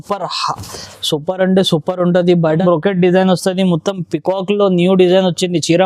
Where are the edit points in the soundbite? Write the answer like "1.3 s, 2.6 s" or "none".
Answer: 2.6 s